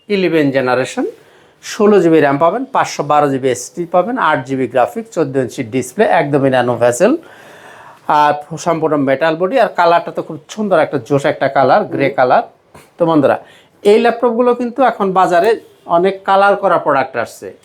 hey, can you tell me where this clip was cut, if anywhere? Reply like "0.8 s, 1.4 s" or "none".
none